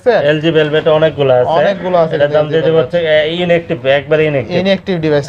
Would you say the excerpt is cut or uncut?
uncut